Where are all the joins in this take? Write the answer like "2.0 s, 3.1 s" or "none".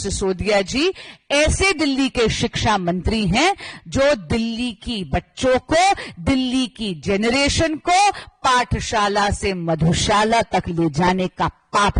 none